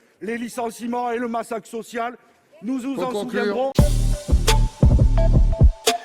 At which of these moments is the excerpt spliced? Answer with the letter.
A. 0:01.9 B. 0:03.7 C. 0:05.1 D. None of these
B